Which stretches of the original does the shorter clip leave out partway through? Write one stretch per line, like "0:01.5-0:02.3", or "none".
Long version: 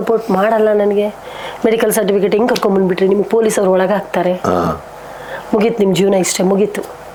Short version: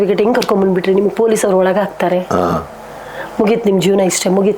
none